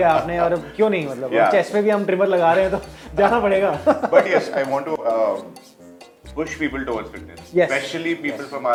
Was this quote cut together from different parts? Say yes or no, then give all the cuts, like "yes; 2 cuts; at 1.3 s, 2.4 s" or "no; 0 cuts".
no; 0 cuts